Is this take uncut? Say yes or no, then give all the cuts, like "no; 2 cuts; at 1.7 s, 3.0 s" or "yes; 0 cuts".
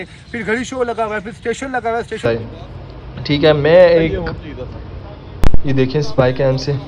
no; 1 cut; at 2.3 s